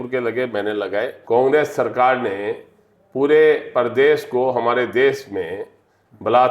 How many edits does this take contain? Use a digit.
1